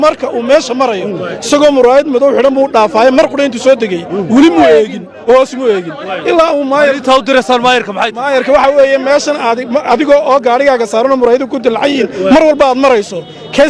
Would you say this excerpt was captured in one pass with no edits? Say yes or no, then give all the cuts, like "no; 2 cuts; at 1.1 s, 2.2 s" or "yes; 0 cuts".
yes; 0 cuts